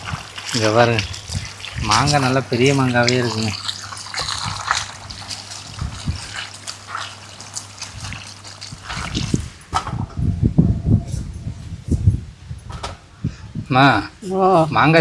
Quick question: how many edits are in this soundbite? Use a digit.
1